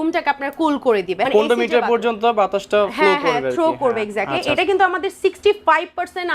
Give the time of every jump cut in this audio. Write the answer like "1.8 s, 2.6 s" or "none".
1.3 s, 4.6 s

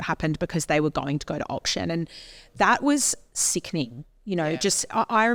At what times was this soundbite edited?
none

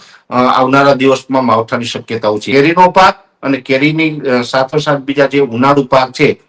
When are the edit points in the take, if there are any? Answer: 2.4 s

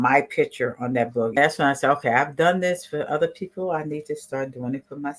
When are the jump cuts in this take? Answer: 1.4 s

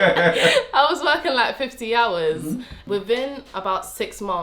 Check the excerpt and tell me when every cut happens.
2.7 s

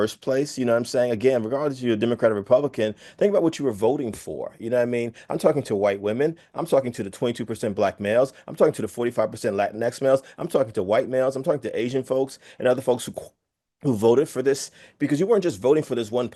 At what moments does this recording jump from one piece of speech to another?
none

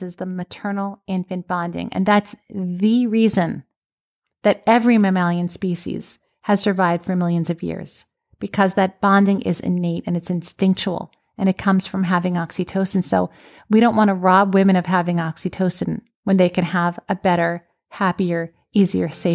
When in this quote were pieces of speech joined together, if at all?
none

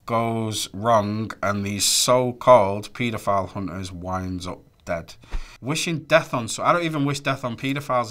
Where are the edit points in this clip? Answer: none

